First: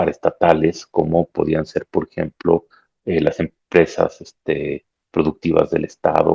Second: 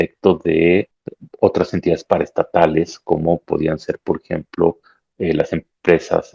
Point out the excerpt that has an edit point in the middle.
second; 1 cut; at 1.0 s

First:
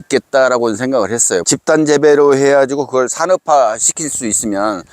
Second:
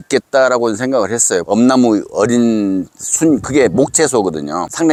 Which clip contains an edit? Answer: first; 1 cut; at 1.4 s

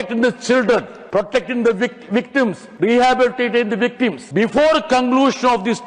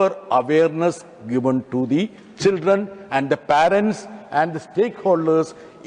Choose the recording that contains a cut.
first; 3 cuts; at 1.0 s, 2.6 s, 4.2 s

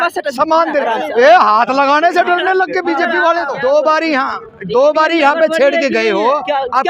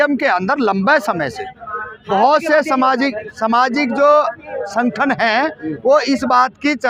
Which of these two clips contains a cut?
first; 1 cut; at 3.5 s

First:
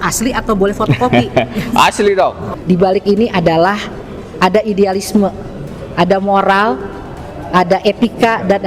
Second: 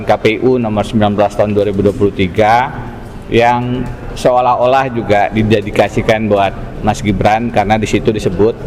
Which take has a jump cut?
first; 1 cut; at 2.5 s

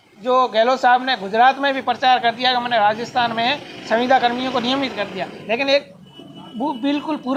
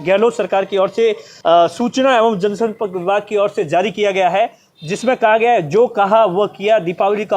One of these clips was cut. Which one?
second; 1 cut; at 1.3 s

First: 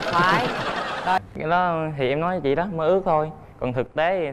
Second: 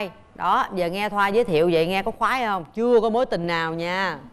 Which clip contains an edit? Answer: first; 1 cut; at 1.2 s

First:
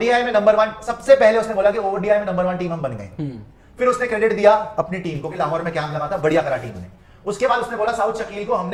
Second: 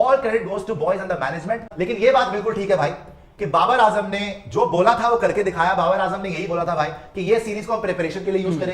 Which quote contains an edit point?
second; 1 cut; at 1.7 s

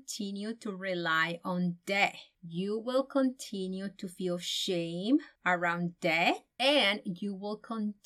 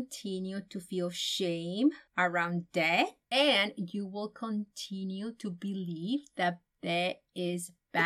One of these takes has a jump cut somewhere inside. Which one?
first; 1 cut; at 2.3 s

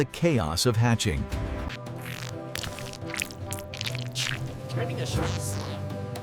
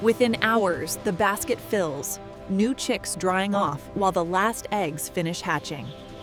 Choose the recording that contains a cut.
first; 1 cut; at 1.7 s

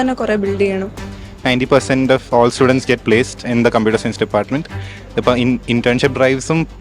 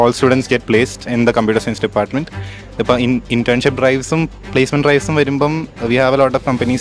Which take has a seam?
first; 1 cut; at 1.1 s

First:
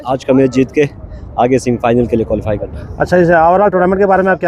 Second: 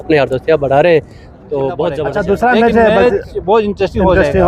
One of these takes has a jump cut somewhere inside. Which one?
second; 1 cut; at 2.0 s

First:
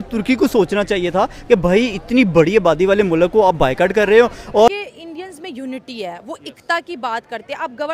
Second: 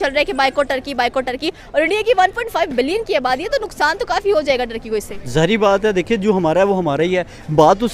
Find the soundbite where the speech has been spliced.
first; 1 cut; at 4.7 s

